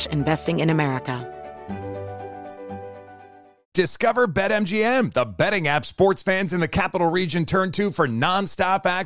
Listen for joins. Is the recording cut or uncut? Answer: cut